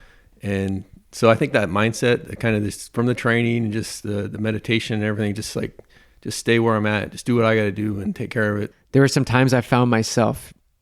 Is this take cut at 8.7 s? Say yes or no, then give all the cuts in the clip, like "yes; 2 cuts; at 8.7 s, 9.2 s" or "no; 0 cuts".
yes; 1 cut; at 8.7 s